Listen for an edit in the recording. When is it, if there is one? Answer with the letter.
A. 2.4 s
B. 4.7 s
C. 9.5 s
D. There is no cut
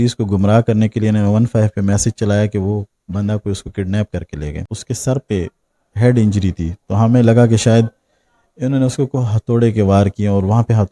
B